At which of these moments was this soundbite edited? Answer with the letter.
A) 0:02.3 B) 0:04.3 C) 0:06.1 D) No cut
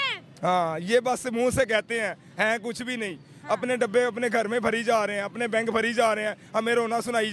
D